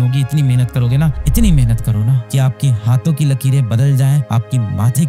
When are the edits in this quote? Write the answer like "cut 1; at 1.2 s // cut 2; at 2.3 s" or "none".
none